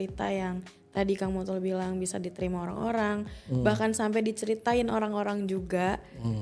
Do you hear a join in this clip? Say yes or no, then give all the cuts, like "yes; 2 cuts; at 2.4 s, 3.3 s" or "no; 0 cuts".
no; 0 cuts